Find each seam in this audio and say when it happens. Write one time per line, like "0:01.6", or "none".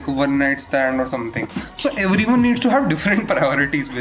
none